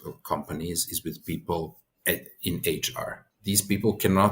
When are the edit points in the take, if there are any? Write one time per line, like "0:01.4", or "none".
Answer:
0:01.9
0:03.2

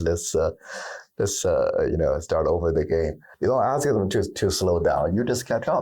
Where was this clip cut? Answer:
0:03.2

